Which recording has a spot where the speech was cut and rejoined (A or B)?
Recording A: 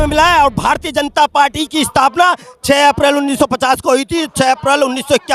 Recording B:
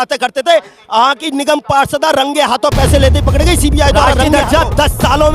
B